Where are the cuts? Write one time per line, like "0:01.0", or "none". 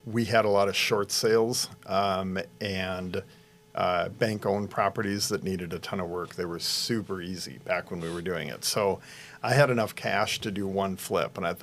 none

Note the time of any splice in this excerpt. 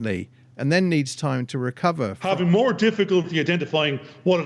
0:02.2

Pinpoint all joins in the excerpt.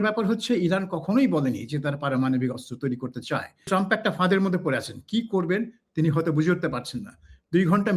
0:03.7

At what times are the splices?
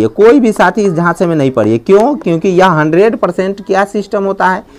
none

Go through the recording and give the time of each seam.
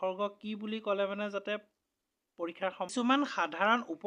0:02.9

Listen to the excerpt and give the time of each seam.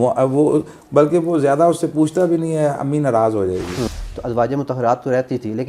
0:04.0

